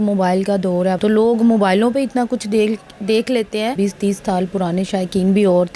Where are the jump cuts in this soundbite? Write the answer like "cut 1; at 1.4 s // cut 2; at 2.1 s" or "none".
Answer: cut 1; at 1.0 s // cut 2; at 3.8 s